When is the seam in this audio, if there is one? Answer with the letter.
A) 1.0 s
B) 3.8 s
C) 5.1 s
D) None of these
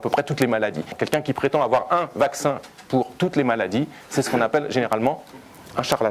A